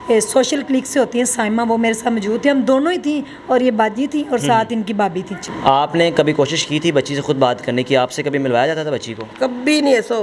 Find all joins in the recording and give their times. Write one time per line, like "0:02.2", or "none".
0:05.4